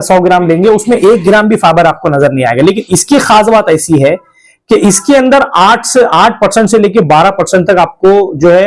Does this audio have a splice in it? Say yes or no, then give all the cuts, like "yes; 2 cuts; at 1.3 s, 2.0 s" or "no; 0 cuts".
no; 0 cuts